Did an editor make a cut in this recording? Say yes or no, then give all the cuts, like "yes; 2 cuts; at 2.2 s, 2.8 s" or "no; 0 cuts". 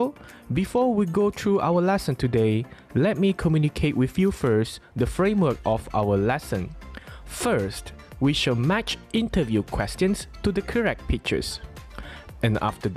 no; 0 cuts